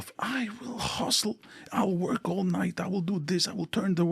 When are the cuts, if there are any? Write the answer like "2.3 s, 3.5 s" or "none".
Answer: none